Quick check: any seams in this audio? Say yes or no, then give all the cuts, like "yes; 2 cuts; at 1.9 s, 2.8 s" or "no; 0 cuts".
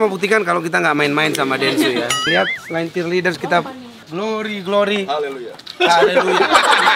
yes; 2 cuts; at 2.2 s, 4.0 s